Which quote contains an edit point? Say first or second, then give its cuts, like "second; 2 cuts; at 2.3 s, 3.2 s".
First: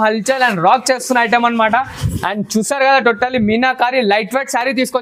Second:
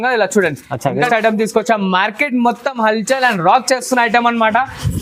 second; 1 cut; at 1.1 s